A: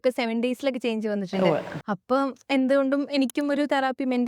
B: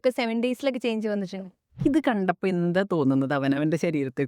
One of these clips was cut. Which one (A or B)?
B